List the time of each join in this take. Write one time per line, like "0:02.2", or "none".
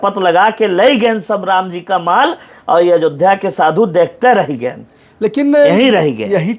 none